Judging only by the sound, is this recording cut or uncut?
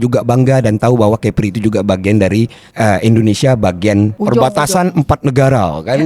cut